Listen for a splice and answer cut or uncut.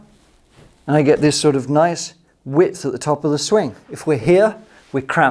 cut